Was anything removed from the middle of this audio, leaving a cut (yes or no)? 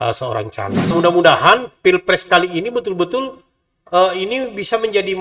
yes